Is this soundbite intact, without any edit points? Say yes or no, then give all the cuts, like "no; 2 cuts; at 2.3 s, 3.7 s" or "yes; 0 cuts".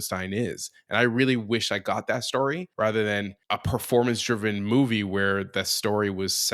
no; 2 cuts; at 2.7 s, 3.4 s